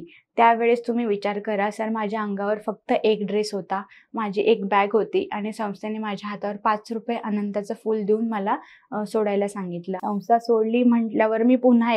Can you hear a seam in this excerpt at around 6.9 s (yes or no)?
no